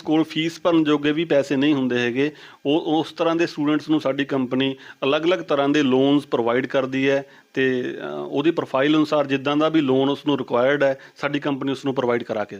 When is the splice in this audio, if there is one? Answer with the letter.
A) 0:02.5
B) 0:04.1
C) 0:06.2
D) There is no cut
D